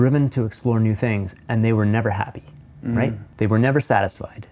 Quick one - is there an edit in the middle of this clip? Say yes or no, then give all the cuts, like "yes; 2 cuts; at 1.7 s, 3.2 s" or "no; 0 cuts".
yes; 1 cut; at 3.2 s